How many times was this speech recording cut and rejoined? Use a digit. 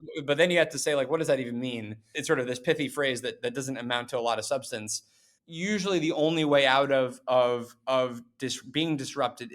1